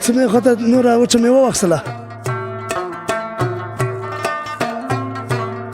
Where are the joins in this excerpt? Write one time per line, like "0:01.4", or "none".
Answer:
0:01.9